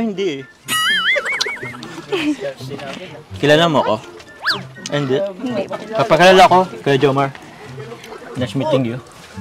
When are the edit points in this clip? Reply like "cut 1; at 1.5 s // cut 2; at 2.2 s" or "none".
none